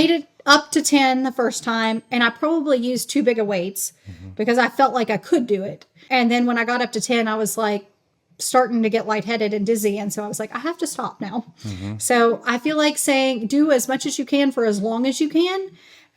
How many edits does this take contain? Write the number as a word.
one